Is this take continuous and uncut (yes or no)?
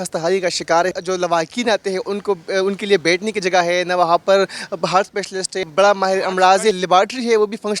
no